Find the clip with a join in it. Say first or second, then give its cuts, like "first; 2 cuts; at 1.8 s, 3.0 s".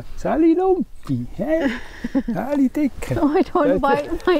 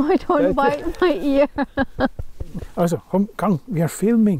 second; 1 cut; at 2.6 s